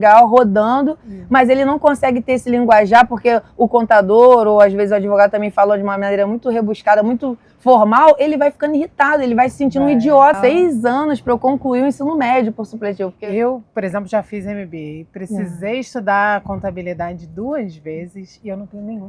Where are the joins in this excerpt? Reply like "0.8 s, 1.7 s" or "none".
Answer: 10.4 s, 13.1 s